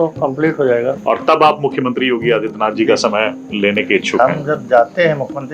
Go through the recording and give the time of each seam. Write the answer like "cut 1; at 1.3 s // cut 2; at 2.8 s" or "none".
cut 1; at 1.0 s